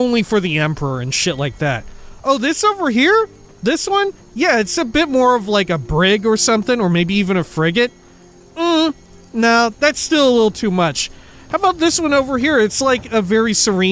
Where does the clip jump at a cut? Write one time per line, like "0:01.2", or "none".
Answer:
none